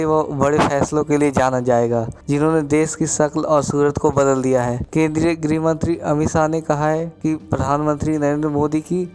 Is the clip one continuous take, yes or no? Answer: no